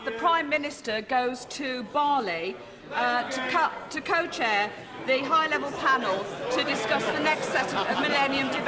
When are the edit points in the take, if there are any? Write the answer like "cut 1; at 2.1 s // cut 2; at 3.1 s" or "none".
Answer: cut 1; at 1.5 s